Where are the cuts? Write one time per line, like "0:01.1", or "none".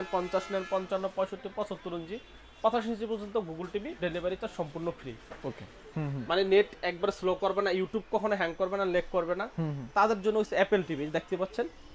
0:05.8